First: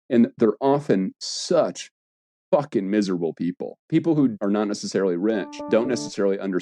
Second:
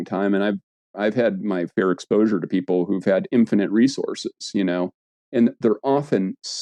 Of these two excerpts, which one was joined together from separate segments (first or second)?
first